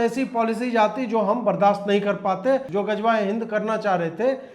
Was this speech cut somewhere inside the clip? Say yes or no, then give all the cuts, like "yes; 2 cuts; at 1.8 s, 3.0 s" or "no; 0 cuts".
yes; 1 cut; at 2.7 s